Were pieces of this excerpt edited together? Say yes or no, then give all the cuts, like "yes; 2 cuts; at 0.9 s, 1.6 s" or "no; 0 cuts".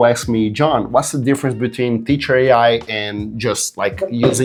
no; 0 cuts